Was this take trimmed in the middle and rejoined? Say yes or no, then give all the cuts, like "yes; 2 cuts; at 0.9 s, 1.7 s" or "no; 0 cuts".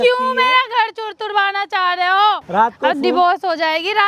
yes; 1 cut; at 2.4 s